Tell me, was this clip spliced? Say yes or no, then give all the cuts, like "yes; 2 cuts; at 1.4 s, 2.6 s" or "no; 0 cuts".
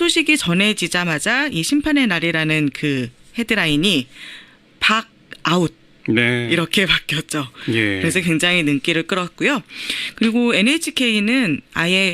yes; 1 cut; at 1.5 s